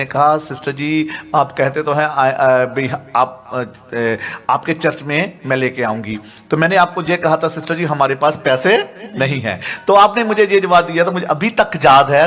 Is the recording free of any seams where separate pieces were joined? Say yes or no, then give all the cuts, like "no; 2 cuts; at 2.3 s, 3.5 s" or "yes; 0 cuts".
yes; 0 cuts